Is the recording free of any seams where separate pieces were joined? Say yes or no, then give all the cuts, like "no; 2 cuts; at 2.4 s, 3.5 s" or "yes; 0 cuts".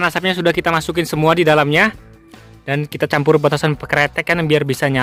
yes; 0 cuts